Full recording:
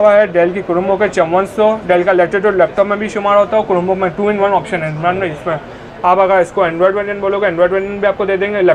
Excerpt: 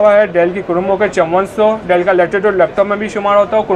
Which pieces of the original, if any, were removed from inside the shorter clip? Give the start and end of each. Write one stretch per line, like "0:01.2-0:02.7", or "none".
none